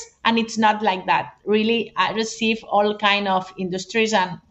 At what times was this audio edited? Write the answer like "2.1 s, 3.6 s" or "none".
none

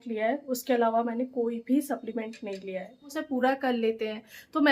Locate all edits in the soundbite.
3.2 s

